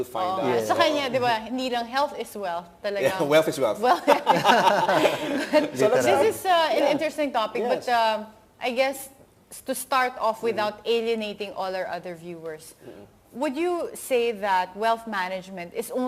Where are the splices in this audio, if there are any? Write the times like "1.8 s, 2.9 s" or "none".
7.0 s

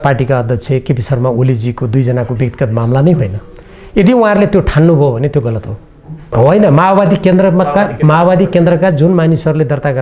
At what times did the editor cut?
6.2 s

